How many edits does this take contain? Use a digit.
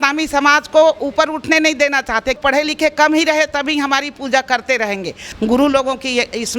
2